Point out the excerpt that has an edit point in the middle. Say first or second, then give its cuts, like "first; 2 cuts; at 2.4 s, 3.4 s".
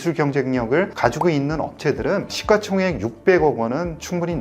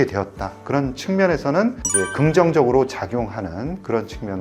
first; 1 cut; at 0.9 s